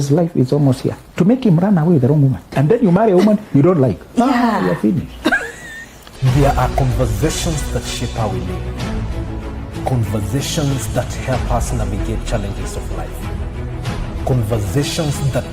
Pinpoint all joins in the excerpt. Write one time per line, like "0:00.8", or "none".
0:01.0
0:02.5
0:06.1